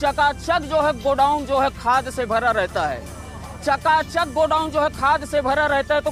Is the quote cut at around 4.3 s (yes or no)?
no